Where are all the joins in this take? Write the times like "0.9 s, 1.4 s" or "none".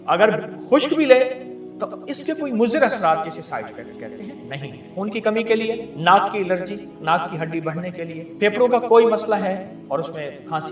4.9 s, 5.9 s, 6.9 s, 8.2 s, 9.7 s